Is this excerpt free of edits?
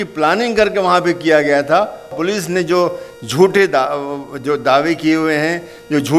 no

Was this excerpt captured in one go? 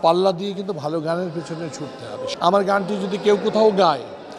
no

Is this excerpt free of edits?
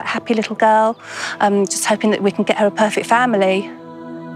yes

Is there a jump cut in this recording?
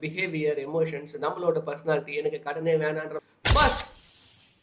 yes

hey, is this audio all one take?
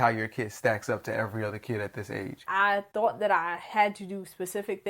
no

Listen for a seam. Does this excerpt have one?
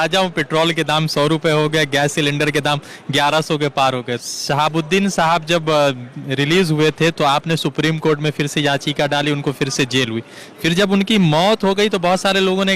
yes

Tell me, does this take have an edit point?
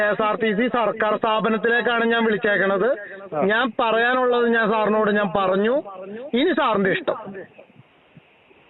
no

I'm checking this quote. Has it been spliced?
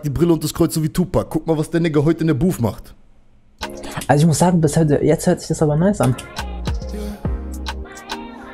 no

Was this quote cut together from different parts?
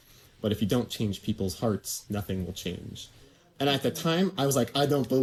no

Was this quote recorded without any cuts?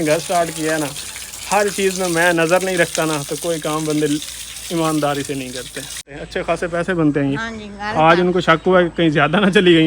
no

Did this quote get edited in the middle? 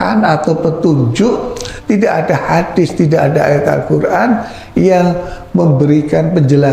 no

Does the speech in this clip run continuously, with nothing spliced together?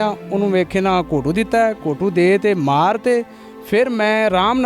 yes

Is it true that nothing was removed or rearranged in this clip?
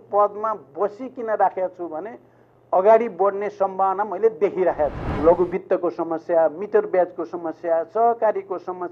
no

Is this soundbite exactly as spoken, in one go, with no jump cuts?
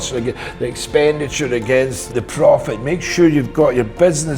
no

